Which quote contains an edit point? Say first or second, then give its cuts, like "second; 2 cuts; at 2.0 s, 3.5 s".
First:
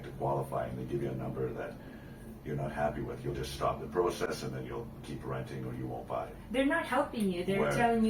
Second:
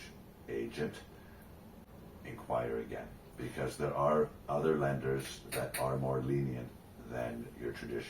second; 1 cut; at 1.9 s